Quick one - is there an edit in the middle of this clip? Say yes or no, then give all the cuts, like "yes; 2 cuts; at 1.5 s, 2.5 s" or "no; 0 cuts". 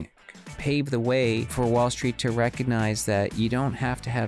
yes; 1 cut; at 1.5 s